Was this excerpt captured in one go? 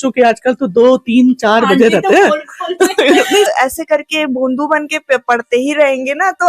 no; 1 cut; at 3.5 s

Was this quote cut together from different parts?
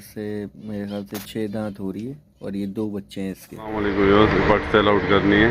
yes; 1 cut; at 3.8 s

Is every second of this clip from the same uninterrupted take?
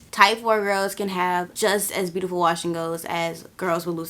no; 1 cut; at 1.5 s

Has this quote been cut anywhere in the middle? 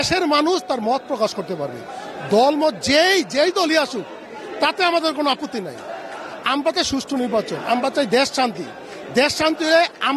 no; 0 cuts

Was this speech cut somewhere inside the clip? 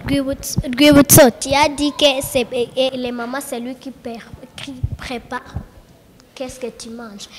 yes; 1 cut; at 2.9 s

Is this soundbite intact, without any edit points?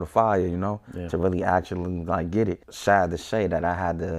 no; 1 cut; at 2.7 s

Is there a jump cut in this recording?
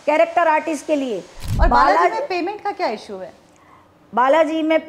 yes; 1 cut; at 1.4 s

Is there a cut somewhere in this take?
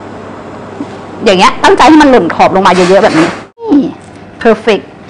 yes; 1 cut; at 3.6 s

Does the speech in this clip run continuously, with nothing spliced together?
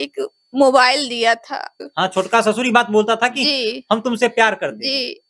no; 1 cut; at 1.8 s

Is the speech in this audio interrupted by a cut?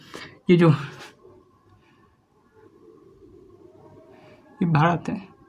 no; 0 cuts

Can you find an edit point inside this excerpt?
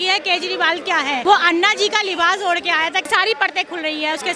yes; 2 cuts; at 1.2 s, 3.1 s

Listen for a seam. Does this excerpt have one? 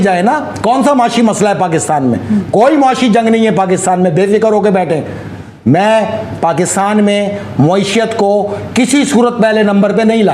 no; 0 cuts

